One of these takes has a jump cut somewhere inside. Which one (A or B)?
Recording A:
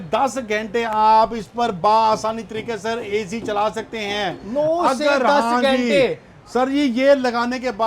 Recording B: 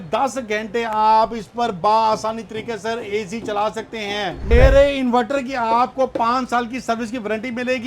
B